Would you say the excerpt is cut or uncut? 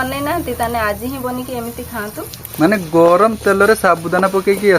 cut